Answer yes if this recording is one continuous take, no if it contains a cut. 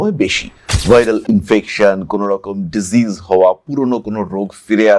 yes